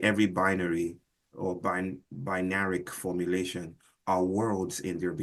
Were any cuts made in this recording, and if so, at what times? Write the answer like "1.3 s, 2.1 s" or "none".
1.2 s